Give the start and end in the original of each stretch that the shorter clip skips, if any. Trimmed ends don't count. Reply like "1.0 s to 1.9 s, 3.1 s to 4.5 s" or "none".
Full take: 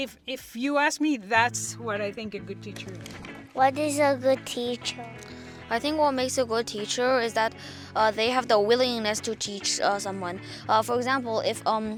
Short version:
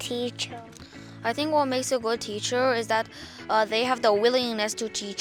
none